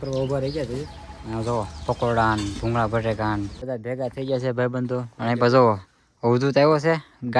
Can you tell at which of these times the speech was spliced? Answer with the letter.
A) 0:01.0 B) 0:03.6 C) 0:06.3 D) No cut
B